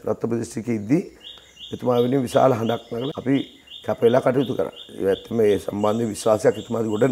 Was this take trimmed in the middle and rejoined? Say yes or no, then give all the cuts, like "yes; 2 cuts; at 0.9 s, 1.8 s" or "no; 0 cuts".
no; 0 cuts